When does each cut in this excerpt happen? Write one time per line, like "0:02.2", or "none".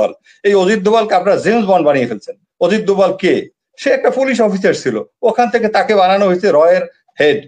none